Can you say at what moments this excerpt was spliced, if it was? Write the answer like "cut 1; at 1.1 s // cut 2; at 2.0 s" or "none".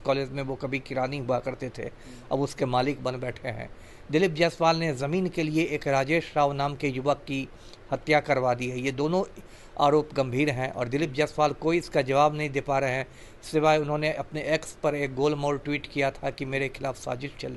none